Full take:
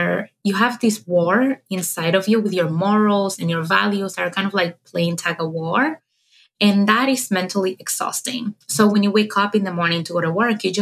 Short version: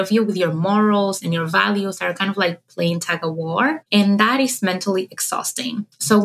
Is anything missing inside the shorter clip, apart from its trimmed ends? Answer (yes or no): yes